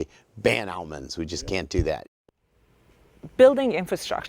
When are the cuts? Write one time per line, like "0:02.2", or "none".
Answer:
0:02.0

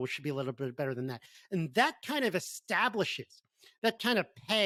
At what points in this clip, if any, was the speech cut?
none

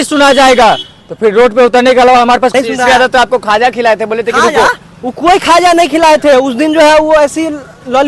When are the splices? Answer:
0:02.5

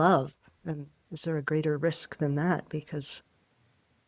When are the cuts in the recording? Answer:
none

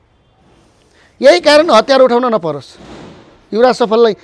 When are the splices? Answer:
none

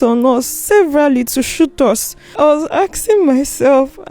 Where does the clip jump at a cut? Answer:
0:02.3

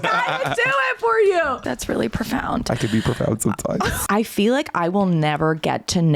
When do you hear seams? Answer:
0:01.6
0:04.0

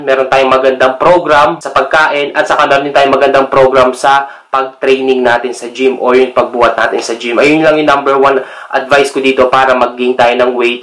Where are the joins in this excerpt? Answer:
0:01.6

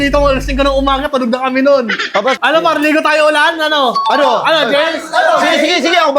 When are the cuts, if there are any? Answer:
0:02.4

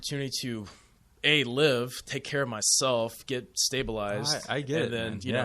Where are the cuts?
none

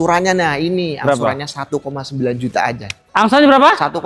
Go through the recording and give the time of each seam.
none

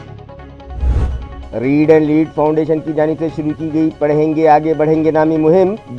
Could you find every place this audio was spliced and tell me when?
0:01.4

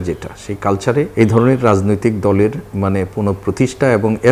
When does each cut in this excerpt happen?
0:01.1

